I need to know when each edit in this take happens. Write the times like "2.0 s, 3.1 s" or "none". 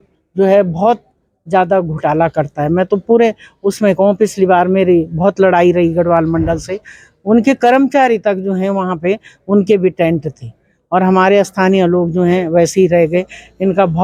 none